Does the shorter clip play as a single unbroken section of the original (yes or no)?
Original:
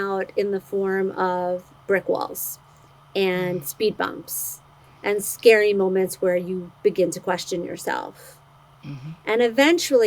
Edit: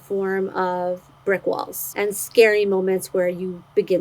no